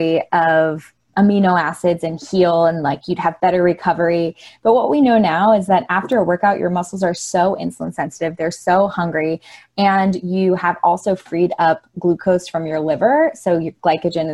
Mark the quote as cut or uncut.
uncut